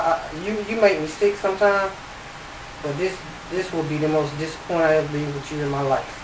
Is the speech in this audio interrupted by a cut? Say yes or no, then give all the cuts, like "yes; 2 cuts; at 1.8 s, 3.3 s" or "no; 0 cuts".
no; 0 cuts